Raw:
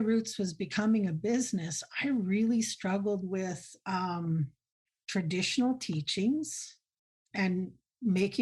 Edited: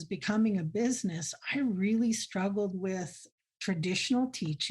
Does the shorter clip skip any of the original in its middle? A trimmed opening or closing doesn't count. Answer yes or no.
yes